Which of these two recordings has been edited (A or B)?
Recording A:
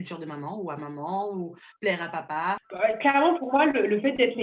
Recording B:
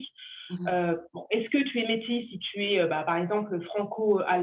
A